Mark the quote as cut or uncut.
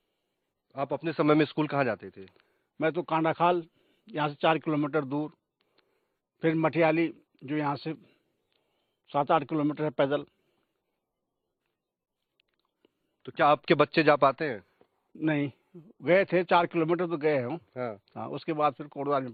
uncut